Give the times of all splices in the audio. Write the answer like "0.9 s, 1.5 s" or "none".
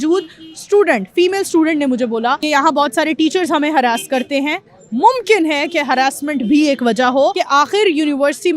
2.4 s, 7.3 s